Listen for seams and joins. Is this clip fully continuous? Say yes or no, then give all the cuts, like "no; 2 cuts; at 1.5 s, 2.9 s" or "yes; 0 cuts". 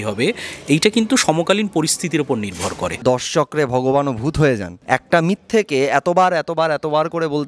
no; 2 cuts; at 3.0 s, 4.7 s